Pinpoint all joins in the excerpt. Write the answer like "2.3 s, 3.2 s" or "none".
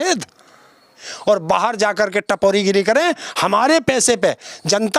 1.0 s